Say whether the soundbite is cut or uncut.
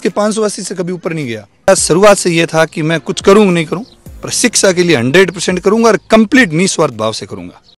cut